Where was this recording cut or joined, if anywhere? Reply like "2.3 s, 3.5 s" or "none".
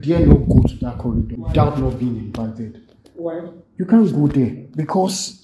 1.4 s